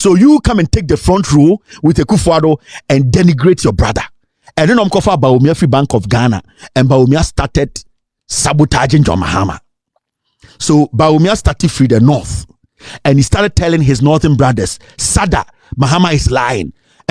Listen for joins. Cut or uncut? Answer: uncut